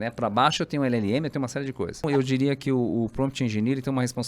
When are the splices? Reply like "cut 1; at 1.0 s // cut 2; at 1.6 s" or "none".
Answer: cut 1; at 2.1 s